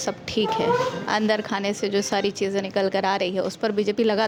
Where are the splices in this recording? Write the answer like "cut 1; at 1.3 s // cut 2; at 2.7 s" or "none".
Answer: none